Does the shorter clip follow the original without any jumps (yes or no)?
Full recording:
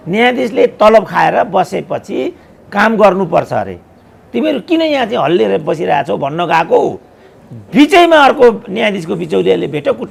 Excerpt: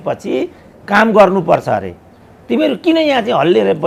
yes